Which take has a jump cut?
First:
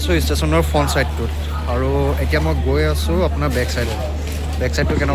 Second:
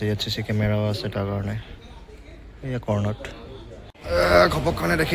second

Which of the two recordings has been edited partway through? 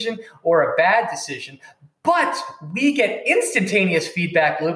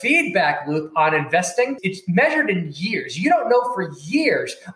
second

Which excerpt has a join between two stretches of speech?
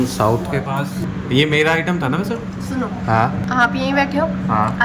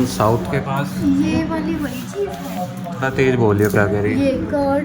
first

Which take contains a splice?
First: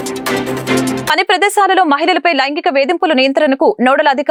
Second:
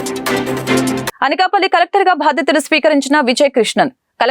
second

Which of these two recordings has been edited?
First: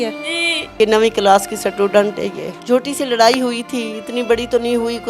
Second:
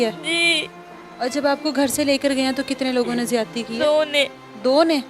first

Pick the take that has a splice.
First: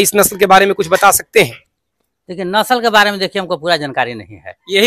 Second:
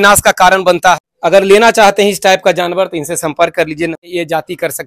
second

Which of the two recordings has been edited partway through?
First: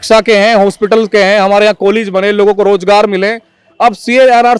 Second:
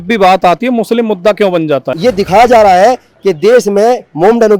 second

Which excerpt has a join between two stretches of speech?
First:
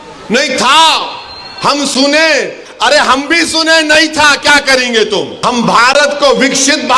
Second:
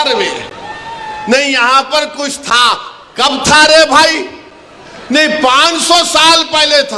first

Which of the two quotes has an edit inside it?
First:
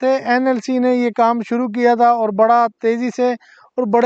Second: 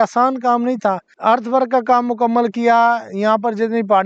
second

